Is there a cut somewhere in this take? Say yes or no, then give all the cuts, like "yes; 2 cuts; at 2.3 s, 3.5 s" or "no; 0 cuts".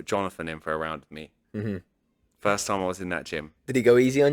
yes; 1 cut; at 1.3 s